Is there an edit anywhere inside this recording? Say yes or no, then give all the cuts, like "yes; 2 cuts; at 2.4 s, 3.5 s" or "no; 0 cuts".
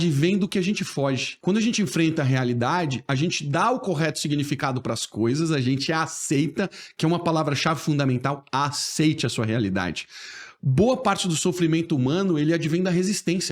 yes; 1 cut; at 1.3 s